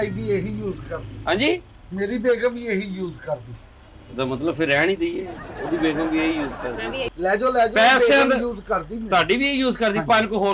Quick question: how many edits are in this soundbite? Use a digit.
1